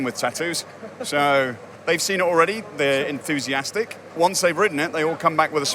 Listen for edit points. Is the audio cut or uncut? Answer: cut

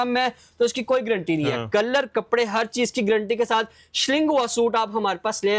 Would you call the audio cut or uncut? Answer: uncut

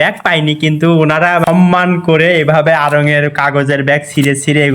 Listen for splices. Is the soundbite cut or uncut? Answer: cut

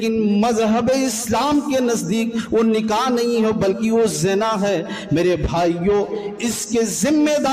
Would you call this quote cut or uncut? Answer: uncut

